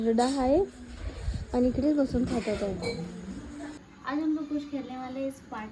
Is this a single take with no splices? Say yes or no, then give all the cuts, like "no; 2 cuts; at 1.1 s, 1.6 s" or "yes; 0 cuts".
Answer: no; 1 cut; at 3.7 s